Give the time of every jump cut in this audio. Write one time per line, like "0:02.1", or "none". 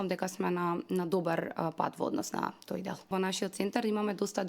0:03.1